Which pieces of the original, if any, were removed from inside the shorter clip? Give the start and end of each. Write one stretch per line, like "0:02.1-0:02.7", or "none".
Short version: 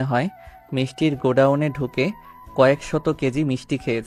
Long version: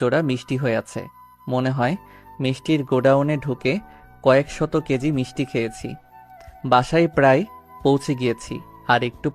none